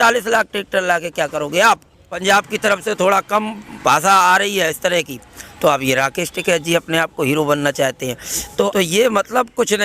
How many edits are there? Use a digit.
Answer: 2